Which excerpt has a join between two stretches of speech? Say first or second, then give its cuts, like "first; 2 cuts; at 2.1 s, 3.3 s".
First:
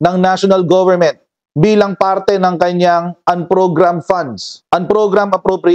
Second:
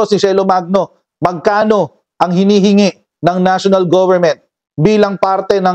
first; 1 cut; at 4.5 s